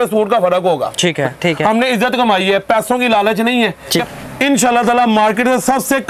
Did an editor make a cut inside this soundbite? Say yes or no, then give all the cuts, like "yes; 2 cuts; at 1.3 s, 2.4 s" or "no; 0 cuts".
yes; 2 cuts; at 1.4 s, 4.1 s